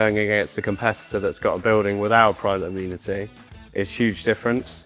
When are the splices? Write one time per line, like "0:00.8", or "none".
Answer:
none